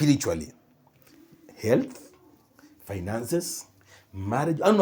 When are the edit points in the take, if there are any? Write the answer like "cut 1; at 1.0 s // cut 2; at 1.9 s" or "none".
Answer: none